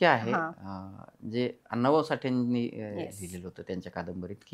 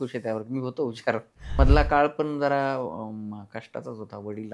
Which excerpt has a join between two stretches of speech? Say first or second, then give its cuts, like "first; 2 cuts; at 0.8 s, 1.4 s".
second; 1 cut; at 1.6 s